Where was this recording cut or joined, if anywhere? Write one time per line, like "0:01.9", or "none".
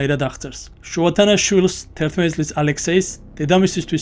none